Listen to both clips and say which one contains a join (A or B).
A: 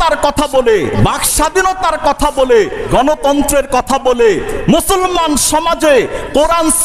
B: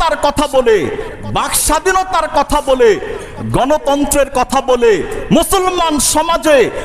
A